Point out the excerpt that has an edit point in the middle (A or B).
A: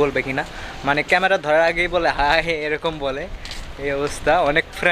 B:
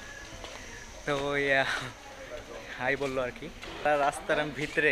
B